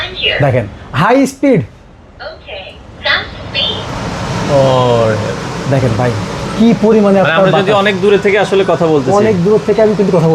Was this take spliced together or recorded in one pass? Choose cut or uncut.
uncut